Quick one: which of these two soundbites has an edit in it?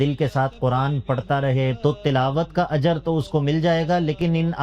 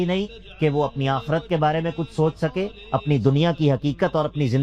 first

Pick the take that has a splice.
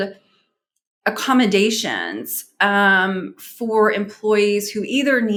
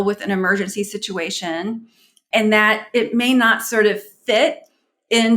second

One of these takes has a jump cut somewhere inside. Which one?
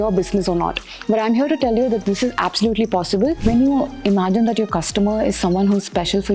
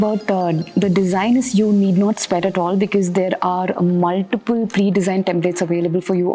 first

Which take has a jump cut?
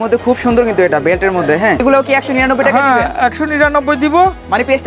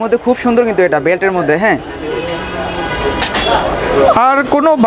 first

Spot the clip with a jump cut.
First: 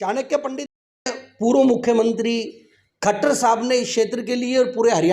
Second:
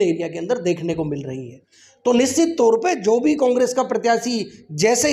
first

